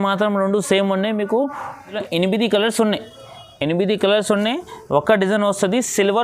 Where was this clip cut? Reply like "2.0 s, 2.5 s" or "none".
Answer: 2.0 s